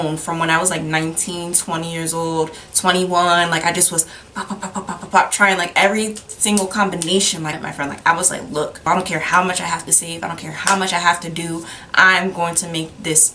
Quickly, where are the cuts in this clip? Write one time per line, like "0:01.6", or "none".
0:07.6